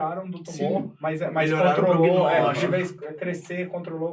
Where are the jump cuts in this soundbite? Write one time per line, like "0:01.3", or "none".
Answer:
none